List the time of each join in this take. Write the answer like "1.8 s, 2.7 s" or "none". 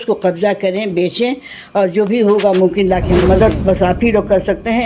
3.2 s

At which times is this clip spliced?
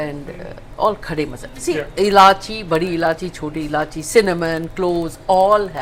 none

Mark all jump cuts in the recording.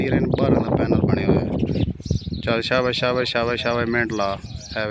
1.8 s

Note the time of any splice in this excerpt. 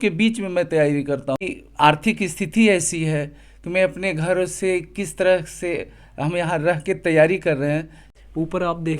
1.4 s, 8.0 s

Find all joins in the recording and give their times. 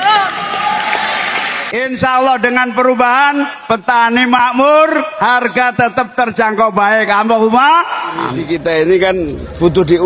1.6 s, 8.4 s

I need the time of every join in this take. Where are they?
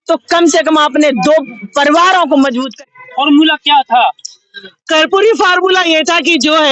2.8 s

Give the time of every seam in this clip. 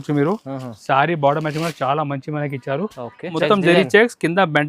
3.3 s

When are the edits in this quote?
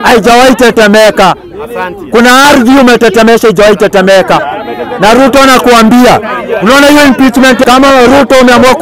7.6 s

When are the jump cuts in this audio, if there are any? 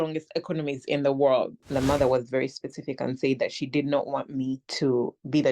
1.6 s

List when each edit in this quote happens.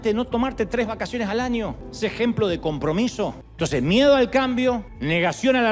3.5 s

